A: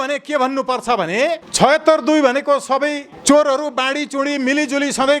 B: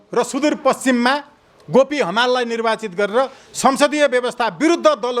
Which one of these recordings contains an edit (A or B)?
A